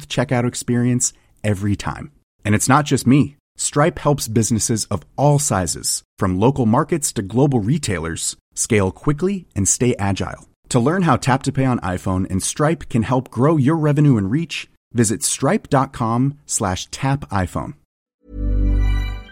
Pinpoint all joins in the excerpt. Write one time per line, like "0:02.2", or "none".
0:18.1